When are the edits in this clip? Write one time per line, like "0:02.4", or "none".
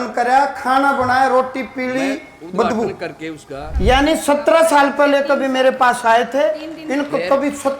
0:03.6

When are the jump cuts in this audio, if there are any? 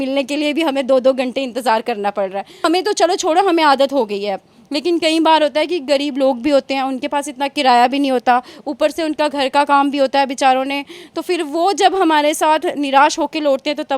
0:02.5

